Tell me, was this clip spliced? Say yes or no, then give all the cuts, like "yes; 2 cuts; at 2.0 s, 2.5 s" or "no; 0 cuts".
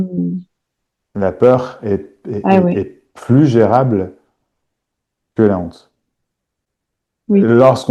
no; 0 cuts